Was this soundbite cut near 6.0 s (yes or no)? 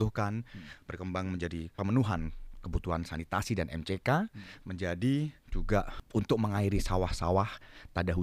yes